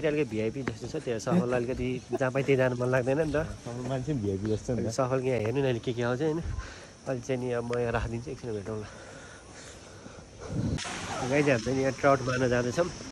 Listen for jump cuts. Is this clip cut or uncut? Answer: uncut